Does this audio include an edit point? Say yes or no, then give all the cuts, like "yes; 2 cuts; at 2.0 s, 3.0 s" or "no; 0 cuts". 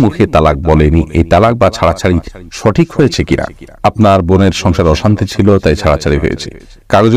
no; 0 cuts